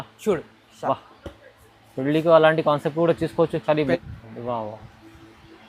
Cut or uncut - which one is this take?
cut